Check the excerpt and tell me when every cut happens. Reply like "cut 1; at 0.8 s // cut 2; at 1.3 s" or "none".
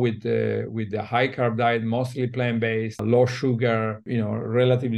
cut 1; at 3.0 s // cut 2; at 4.0 s